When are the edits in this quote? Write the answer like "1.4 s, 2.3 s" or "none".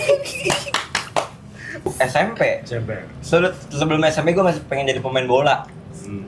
1.9 s